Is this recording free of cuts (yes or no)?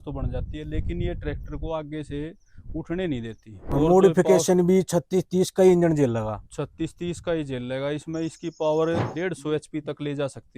no